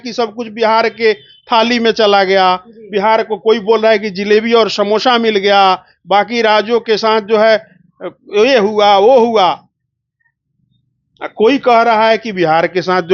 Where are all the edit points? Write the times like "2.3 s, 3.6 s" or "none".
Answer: none